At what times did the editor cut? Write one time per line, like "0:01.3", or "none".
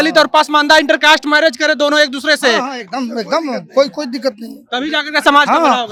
none